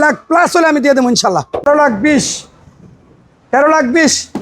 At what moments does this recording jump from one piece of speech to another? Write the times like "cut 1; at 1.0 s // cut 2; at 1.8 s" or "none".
cut 1; at 1.6 s